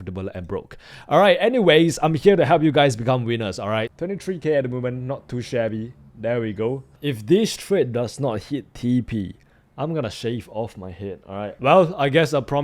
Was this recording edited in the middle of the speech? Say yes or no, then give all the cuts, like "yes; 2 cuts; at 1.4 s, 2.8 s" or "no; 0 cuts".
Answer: yes; 2 cuts; at 3.9 s, 11.5 s